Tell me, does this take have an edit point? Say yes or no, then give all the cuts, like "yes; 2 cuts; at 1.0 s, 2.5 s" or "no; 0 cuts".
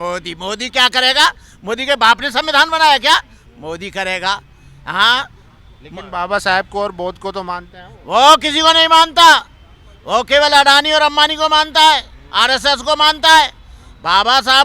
no; 0 cuts